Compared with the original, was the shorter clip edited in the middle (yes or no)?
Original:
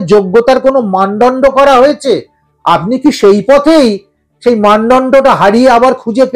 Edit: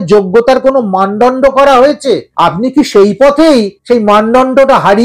yes